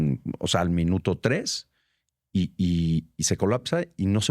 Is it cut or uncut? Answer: uncut